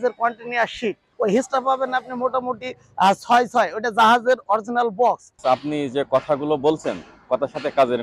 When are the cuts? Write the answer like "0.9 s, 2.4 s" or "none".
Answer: 1.0 s, 5.4 s